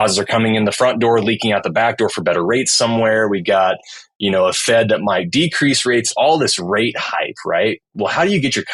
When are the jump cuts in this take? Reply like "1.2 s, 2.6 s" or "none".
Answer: 6.1 s